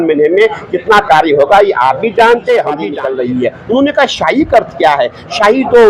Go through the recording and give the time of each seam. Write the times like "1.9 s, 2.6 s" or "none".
2.9 s